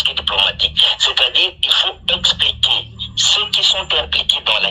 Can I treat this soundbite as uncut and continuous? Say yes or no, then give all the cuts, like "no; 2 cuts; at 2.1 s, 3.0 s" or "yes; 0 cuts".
yes; 0 cuts